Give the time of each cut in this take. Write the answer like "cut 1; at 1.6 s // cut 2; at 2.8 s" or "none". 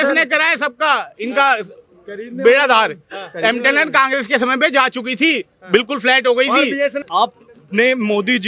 cut 1; at 7.0 s